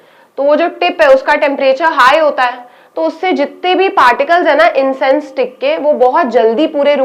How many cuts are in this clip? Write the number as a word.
zero